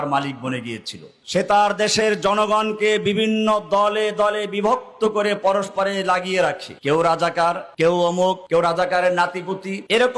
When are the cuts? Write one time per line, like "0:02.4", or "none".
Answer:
0:01.2